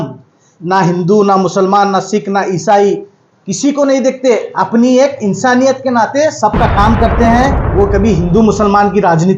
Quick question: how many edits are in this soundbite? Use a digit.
1